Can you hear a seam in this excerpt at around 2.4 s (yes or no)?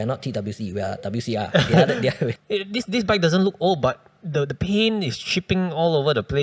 yes